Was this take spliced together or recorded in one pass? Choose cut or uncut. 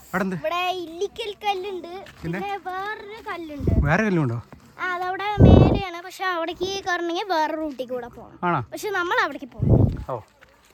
uncut